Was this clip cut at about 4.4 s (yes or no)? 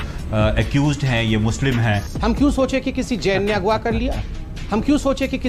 no